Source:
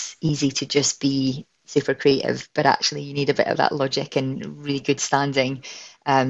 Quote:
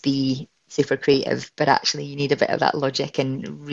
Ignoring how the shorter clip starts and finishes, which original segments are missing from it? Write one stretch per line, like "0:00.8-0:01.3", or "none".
none

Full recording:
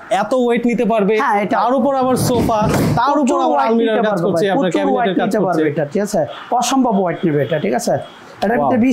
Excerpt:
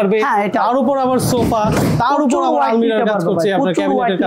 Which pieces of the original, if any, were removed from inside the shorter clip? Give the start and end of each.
none

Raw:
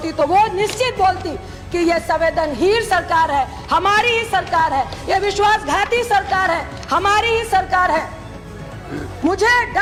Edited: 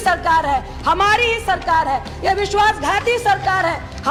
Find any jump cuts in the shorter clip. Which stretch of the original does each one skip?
none

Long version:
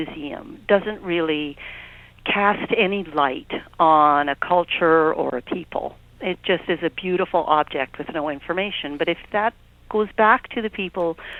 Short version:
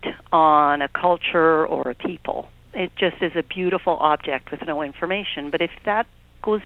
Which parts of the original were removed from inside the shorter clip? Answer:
none

